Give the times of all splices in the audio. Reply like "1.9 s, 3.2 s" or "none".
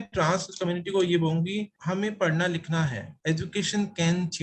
1.7 s, 3.1 s